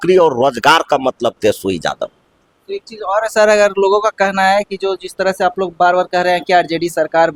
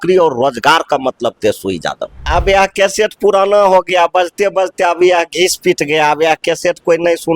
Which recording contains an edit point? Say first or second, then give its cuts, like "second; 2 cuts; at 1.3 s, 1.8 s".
second; 1 cut; at 2.1 s